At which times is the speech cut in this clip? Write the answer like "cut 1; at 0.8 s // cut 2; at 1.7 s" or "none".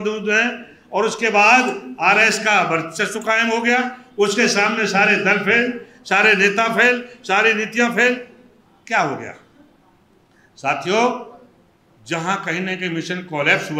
none